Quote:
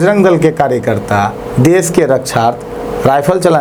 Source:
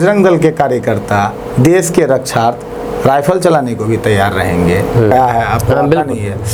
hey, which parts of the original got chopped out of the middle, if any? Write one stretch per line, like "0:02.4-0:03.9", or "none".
none